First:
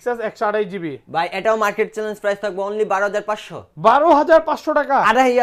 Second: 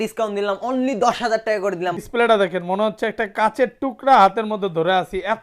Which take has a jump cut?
second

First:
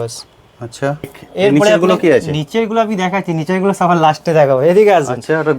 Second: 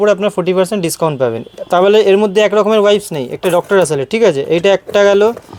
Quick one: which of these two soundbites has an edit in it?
first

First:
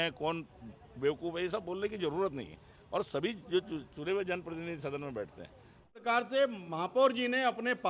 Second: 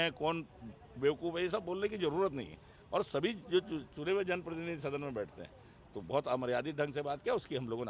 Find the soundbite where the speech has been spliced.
first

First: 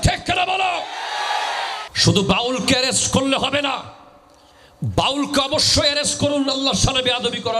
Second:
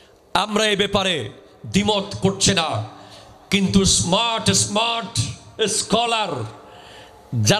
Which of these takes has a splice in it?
first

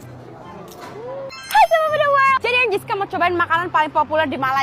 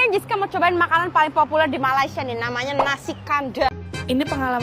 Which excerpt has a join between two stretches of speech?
second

